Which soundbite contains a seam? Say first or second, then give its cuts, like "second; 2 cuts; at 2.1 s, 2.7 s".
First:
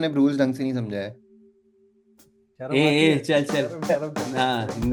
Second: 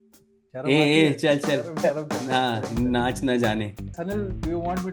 second; 1 cut; at 3.9 s